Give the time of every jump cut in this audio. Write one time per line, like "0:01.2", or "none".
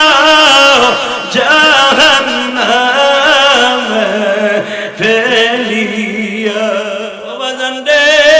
0:07.2